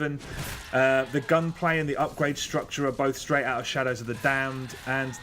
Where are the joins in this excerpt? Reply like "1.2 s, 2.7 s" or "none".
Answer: 1.5 s